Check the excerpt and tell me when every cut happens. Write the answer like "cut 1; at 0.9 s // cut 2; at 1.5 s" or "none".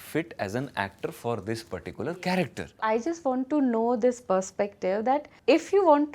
cut 1; at 2.9 s // cut 2; at 5.3 s